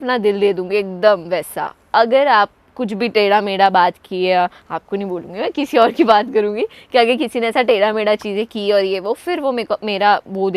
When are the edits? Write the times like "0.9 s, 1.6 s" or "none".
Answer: none